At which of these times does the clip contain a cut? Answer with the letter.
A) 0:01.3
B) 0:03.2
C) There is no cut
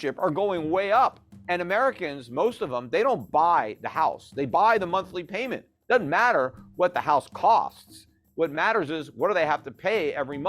A